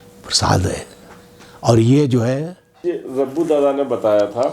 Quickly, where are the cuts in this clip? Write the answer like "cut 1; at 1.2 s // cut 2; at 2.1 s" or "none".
cut 1; at 3.0 s